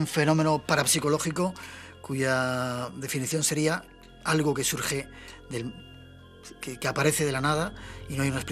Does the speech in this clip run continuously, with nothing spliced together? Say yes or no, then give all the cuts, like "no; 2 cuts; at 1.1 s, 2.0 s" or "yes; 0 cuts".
yes; 0 cuts